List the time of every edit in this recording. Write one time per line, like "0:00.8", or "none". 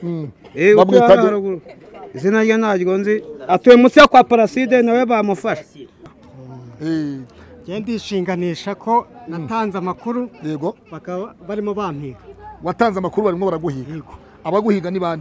0:06.2